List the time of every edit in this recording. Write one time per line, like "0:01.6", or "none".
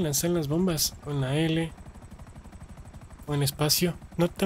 none